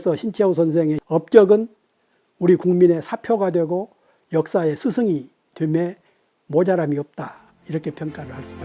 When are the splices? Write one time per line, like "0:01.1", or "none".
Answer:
none